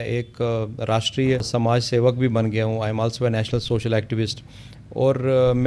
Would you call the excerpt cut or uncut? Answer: cut